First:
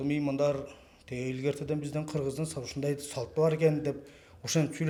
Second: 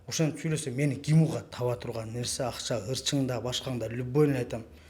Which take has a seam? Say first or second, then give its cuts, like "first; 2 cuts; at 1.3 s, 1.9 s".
second; 1 cut; at 1.5 s